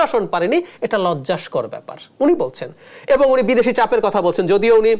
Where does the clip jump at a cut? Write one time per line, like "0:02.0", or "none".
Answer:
none